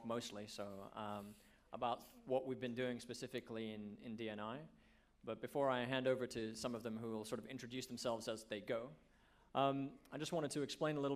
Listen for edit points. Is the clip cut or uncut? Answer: uncut